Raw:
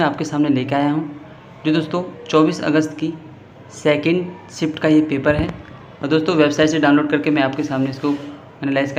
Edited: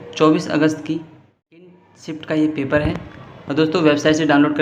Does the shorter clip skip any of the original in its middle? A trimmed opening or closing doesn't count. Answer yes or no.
yes